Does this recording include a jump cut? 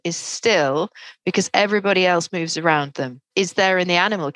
yes; 1 cut; at 3.3 s

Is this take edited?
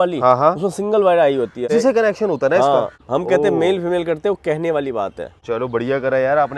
yes; 3 cuts; at 1.7 s, 3.0 s, 5.4 s

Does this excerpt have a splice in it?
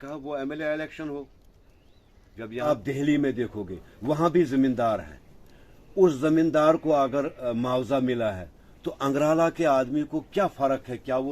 yes; 1 cut; at 2.7 s

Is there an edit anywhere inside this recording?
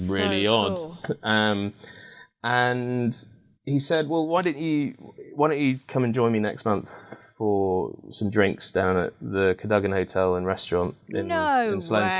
no; 0 cuts

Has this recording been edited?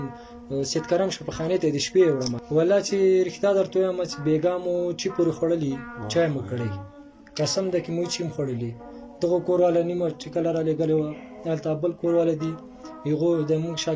yes; 1 cut; at 2.4 s

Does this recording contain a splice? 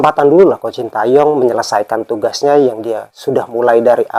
no; 0 cuts

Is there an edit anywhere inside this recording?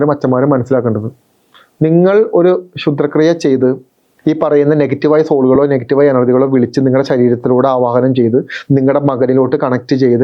no; 0 cuts

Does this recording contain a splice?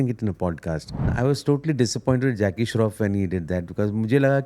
yes; 1 cut; at 1.1 s

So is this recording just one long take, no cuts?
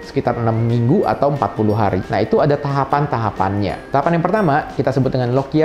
no; 1 cut; at 3.8 s

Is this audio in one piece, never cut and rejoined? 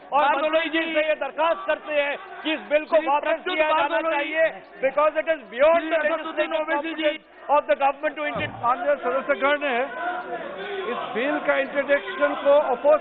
no; 1 cut; at 8.6 s

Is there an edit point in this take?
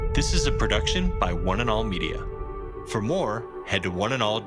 no; 0 cuts

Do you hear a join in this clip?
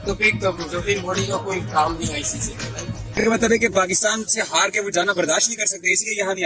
yes; 1 cut; at 3.2 s

